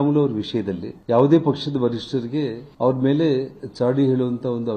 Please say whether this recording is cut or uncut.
cut